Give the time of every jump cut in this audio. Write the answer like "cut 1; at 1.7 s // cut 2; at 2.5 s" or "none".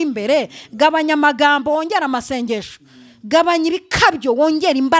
none